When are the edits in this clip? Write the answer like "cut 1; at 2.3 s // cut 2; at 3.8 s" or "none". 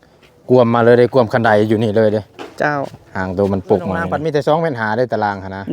cut 1; at 4.4 s